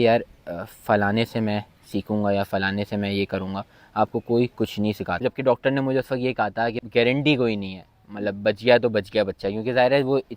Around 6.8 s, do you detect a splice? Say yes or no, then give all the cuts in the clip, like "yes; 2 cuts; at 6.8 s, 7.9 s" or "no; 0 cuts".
yes; 2 cuts; at 5.2 s, 6.8 s